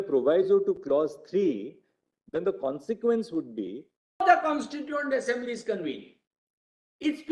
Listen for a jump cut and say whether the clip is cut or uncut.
cut